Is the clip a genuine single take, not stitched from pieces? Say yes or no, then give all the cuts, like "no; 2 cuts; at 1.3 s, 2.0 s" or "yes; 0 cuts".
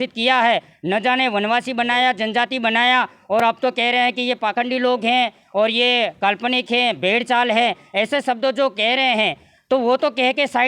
yes; 0 cuts